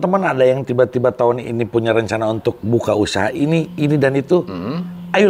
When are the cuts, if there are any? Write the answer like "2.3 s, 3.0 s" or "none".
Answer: none